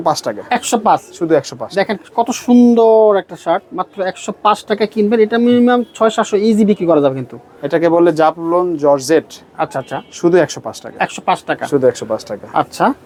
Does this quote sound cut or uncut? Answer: uncut